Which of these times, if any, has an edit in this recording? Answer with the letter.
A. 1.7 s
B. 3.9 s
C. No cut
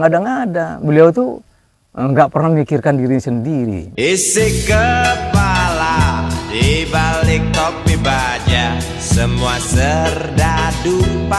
B